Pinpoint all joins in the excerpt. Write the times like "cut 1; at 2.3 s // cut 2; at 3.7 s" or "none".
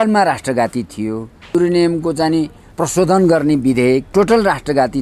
cut 1; at 1.6 s // cut 2; at 2.6 s // cut 3; at 4.1 s